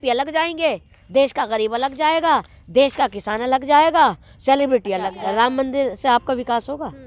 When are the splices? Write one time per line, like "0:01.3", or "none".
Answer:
0:05.2

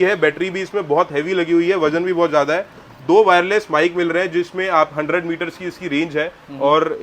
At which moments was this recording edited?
none

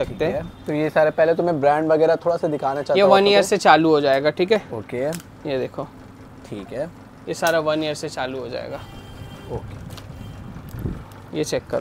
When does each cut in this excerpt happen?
none

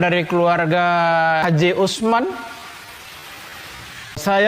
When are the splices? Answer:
0:01.4

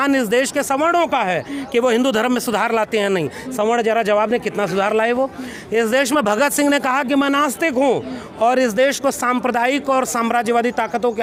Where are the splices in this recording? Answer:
none

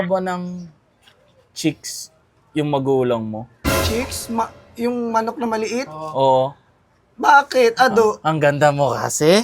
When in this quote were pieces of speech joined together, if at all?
none

